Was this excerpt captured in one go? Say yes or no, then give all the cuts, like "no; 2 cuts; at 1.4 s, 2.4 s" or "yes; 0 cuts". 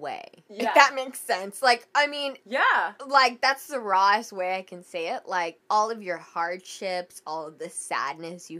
no; 1 cut; at 5.6 s